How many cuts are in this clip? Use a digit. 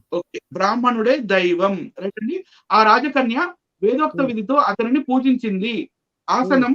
1